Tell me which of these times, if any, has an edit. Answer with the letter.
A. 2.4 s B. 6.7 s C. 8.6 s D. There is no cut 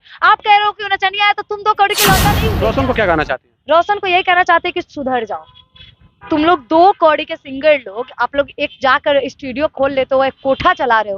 A